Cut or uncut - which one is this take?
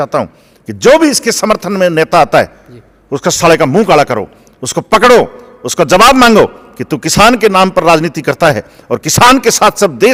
uncut